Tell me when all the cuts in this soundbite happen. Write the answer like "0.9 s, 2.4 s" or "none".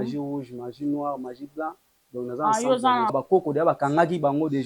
3.1 s